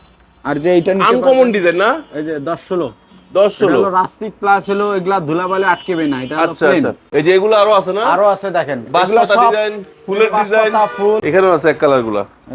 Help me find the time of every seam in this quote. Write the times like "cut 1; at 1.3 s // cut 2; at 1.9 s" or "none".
cut 1; at 7.0 s // cut 2; at 11.2 s